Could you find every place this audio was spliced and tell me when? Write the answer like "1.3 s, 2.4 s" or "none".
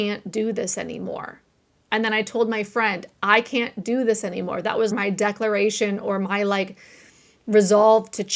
4.9 s